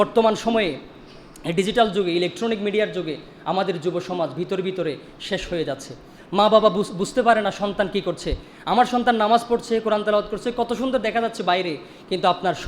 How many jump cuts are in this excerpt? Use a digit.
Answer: 0